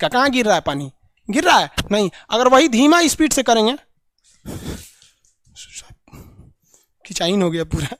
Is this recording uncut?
yes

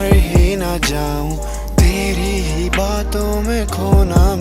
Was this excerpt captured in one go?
yes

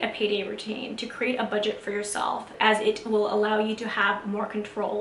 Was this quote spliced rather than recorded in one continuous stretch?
yes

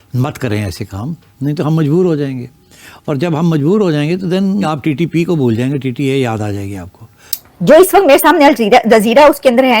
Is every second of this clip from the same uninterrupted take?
no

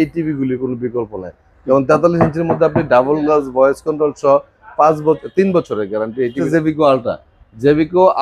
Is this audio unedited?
no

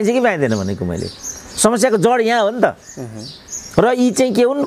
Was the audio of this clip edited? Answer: no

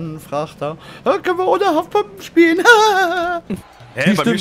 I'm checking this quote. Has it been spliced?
yes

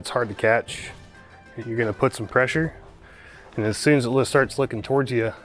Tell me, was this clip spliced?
yes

